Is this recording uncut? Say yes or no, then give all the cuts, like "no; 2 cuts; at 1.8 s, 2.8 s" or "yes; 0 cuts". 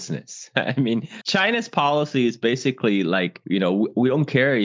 no; 1 cut; at 1.2 s